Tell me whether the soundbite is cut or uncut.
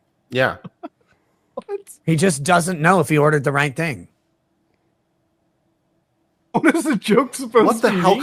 uncut